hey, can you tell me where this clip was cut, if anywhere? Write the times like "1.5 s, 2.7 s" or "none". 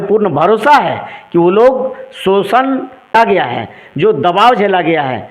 3.1 s